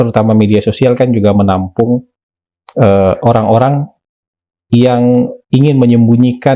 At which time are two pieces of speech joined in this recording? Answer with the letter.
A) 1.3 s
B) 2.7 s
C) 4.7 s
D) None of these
D